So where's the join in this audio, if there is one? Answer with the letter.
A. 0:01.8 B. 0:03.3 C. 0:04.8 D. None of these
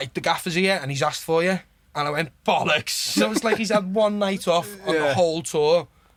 D